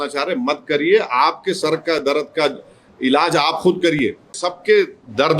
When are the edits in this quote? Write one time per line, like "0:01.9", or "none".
0:04.4